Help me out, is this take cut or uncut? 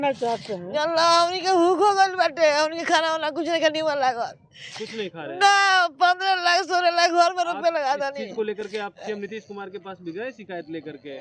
uncut